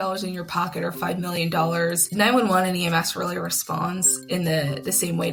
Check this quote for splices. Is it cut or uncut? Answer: uncut